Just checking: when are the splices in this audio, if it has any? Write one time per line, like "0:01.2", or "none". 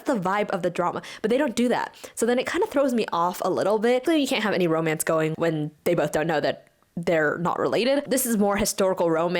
0:04.0
0:08.1